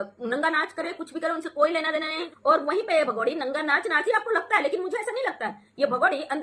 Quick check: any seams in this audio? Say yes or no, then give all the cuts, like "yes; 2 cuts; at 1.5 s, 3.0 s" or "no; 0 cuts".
yes; 1 cut; at 2.2 s